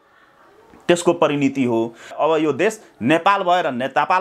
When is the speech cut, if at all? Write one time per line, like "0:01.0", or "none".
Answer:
0:02.1